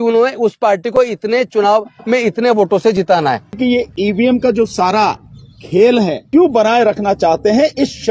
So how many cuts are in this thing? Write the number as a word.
two